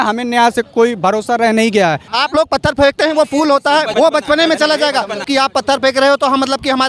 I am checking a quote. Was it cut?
yes; 3 cuts; at 2.1 s, 3.9 s, 5.3 s

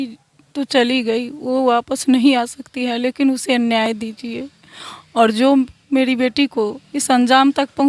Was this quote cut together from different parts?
no; 0 cuts

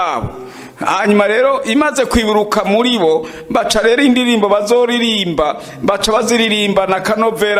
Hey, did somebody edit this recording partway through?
no; 0 cuts

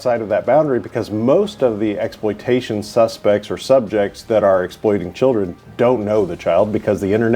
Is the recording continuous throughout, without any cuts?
yes; 0 cuts

